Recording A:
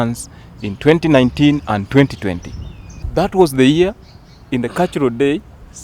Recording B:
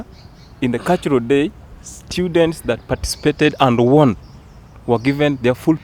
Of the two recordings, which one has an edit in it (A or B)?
A